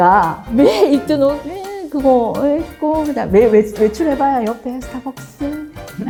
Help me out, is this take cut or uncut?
uncut